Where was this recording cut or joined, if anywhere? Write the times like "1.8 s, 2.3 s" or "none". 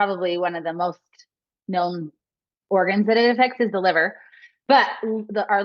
none

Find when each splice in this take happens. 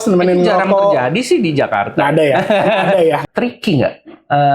3.2 s

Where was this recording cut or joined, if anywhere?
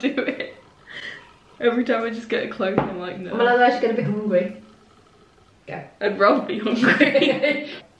none

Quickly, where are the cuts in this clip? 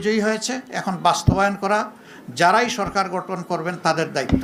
none

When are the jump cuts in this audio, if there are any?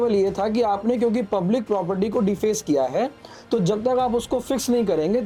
none

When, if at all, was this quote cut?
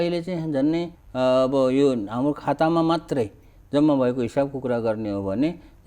1.0 s

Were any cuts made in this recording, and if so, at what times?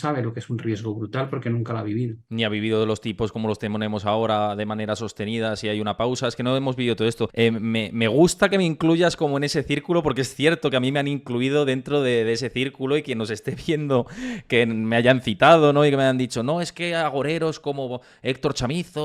none

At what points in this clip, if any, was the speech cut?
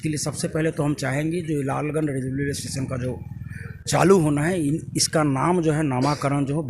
none

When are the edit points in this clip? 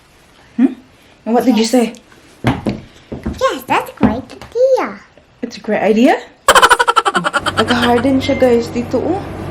6.3 s, 7.4 s

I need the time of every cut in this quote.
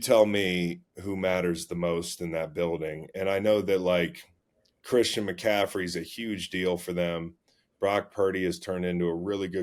none

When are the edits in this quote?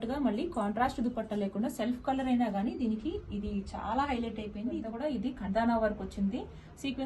4.9 s

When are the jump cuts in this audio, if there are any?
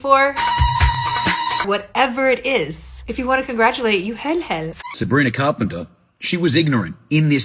4.7 s

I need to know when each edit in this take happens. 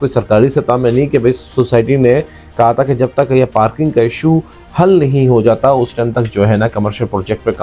none

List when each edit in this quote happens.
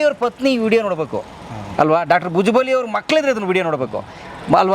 none

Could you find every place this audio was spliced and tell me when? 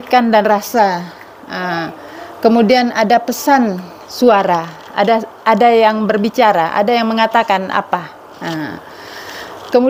none

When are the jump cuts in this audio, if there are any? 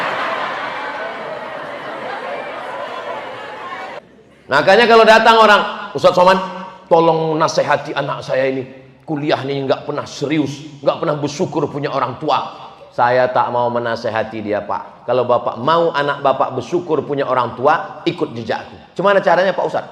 4.0 s

